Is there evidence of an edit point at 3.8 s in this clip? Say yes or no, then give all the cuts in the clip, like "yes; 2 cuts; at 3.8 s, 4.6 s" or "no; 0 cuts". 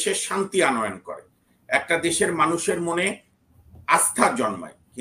no; 0 cuts